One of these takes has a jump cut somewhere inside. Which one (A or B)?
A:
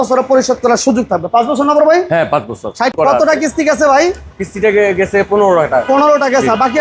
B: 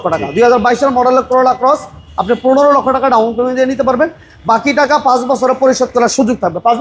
A